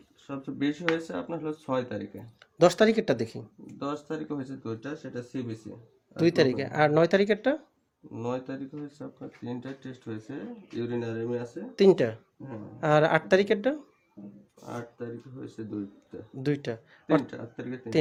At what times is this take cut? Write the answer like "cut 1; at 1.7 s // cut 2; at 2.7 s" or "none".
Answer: none